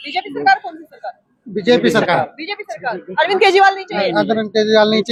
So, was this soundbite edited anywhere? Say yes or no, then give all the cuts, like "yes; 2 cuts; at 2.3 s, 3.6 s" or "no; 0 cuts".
no; 0 cuts